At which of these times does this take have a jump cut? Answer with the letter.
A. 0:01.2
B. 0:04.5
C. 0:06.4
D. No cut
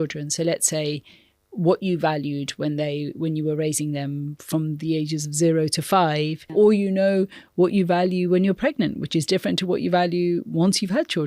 C